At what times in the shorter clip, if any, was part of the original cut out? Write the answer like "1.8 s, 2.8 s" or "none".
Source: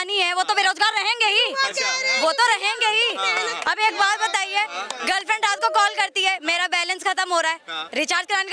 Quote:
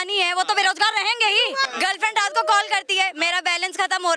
1.7 s